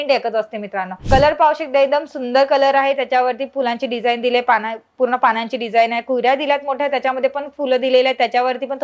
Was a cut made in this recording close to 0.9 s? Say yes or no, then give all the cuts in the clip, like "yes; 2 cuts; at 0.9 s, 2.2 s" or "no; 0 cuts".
yes; 1 cut; at 0.9 s